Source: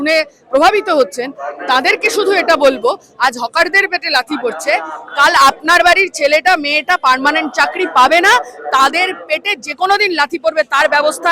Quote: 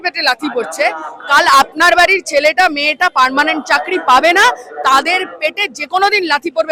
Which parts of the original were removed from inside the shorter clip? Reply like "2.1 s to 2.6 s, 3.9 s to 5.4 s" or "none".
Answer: none